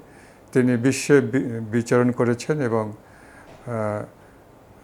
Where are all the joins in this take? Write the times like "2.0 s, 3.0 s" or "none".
none